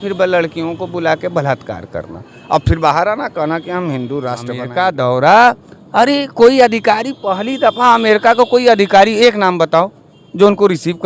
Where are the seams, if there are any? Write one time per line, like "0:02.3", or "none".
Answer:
0:04.6

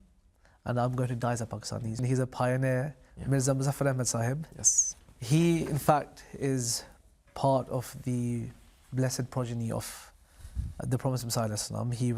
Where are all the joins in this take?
0:02.0

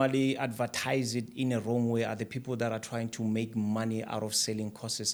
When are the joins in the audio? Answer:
none

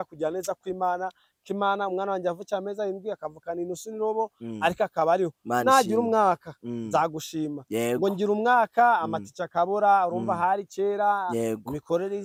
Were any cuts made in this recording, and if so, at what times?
none

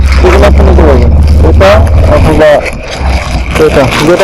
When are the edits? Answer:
none

